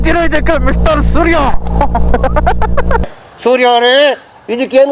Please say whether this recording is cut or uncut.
uncut